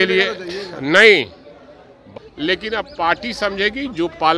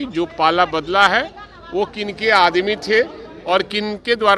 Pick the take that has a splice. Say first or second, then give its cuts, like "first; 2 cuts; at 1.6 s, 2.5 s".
first; 1 cut; at 2.1 s